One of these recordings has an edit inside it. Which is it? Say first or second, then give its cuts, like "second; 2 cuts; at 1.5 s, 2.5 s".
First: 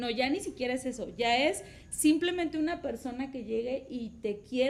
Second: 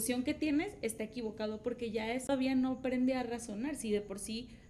second; 1 cut; at 2.3 s